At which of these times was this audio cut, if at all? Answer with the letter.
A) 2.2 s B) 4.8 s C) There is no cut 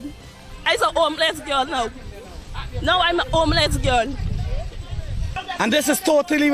C